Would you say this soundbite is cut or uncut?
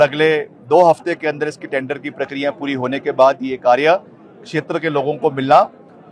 uncut